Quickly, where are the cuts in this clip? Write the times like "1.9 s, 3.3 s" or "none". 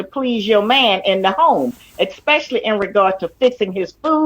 1.0 s

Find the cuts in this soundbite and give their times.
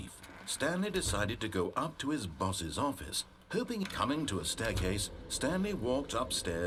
none

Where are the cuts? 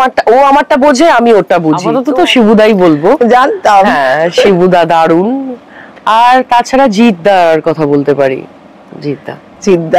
1.9 s

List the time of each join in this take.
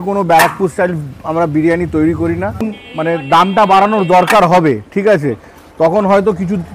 2.6 s

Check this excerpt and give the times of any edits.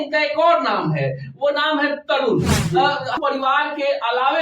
3.2 s

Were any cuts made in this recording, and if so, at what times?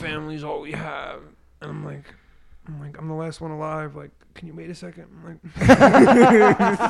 none

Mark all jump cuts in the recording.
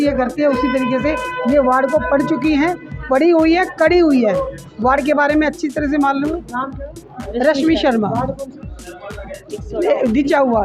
none

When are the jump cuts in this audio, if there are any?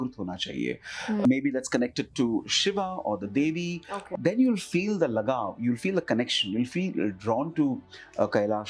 1.2 s, 3.9 s

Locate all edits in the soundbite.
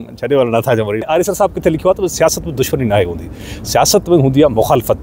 1.1 s

